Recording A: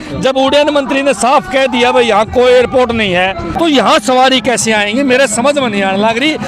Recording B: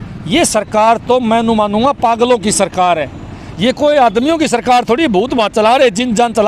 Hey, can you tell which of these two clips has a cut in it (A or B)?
A